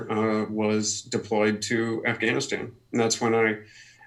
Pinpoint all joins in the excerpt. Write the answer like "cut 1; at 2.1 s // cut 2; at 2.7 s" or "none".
none